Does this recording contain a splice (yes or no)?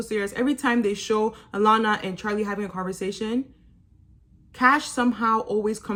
no